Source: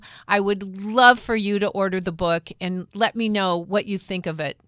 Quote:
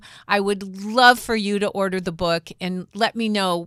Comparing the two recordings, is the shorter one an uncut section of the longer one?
yes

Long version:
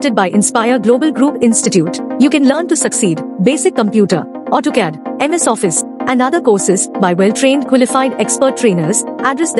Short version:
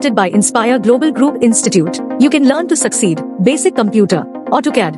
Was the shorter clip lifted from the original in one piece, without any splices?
yes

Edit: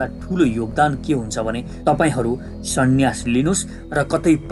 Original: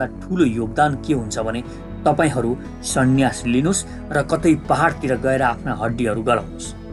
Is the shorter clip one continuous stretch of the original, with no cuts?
no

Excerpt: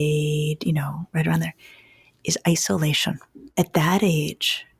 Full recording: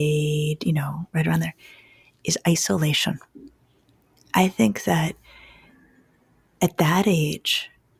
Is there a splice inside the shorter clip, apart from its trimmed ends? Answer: yes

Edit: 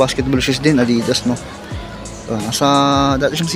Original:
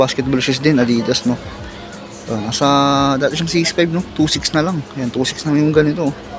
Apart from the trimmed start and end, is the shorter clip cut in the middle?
no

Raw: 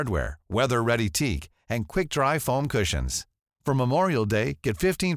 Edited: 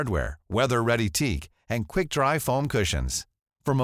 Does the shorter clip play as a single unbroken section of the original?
yes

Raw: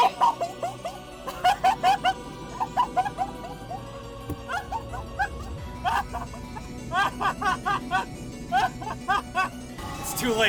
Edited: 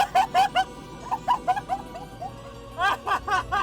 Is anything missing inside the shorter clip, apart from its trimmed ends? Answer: yes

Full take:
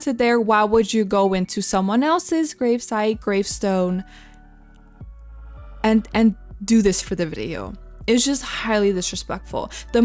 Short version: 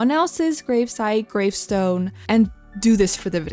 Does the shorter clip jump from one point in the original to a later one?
yes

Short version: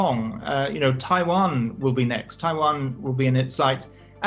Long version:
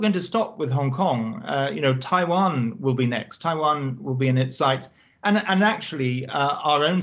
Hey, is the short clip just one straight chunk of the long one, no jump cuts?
yes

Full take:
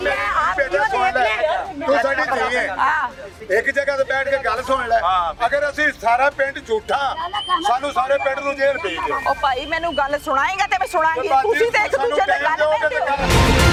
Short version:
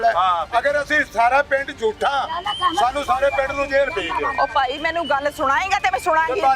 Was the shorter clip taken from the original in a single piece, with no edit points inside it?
yes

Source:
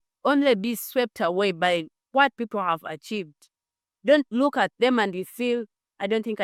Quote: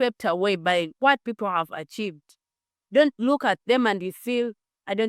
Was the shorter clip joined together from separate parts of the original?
yes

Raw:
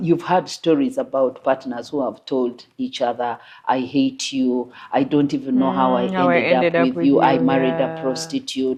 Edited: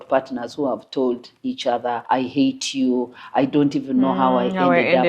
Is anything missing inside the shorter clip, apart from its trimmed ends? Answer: yes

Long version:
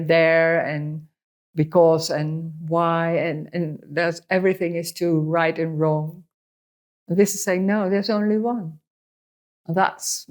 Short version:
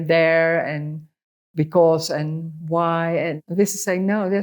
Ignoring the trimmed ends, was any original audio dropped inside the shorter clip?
yes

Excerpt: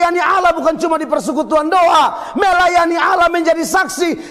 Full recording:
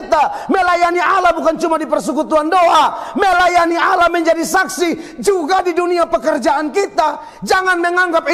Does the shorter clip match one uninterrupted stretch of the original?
yes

